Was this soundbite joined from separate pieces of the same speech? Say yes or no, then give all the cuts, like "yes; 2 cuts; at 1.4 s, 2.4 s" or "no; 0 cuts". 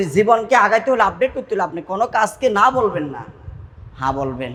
no; 0 cuts